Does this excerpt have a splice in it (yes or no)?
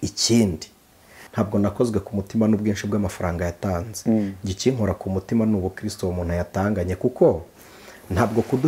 yes